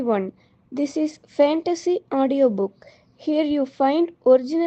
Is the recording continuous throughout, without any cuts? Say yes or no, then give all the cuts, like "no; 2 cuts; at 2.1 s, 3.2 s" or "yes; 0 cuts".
yes; 0 cuts